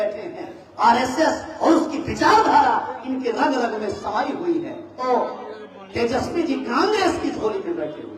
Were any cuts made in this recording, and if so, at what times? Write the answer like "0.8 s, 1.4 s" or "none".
4.8 s